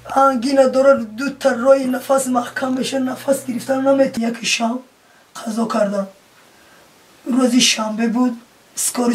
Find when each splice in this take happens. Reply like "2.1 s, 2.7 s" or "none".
4.1 s